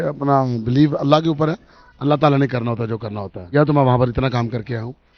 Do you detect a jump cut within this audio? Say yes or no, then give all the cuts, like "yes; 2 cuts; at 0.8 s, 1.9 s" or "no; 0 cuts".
yes; 1 cut; at 3.5 s